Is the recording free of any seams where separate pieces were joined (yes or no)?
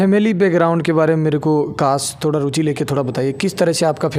yes